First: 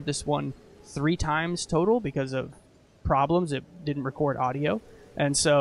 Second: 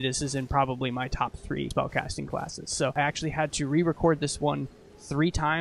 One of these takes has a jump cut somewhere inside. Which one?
second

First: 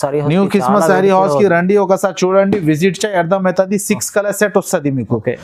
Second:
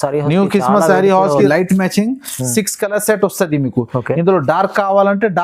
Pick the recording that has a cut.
second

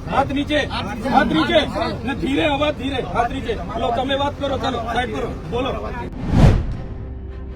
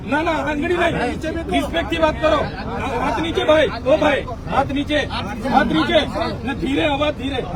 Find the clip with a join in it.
first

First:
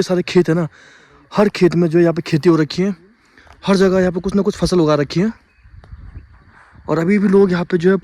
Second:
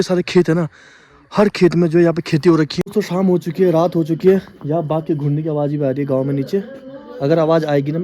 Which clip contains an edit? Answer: second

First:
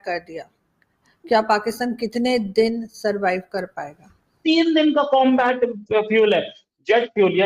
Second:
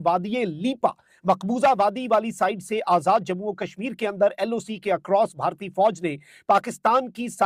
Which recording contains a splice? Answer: first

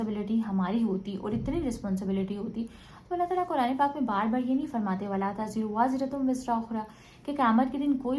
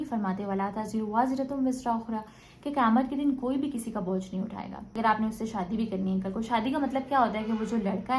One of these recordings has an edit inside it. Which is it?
second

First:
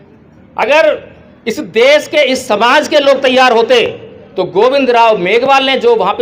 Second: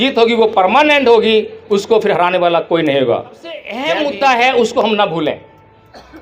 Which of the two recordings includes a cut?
second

